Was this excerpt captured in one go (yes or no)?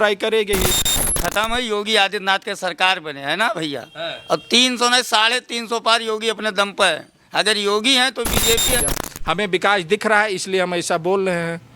no